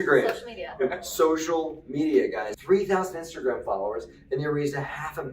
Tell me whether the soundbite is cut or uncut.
cut